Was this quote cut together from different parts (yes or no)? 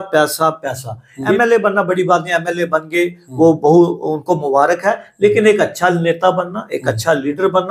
yes